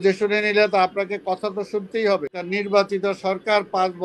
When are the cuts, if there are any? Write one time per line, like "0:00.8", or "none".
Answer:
0:02.4